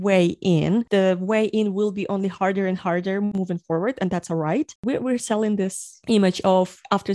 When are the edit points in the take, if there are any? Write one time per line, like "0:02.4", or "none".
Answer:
none